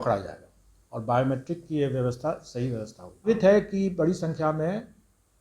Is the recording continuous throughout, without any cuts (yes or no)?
no